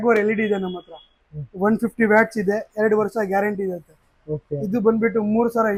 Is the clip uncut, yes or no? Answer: yes